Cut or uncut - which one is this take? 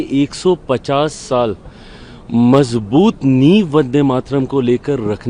uncut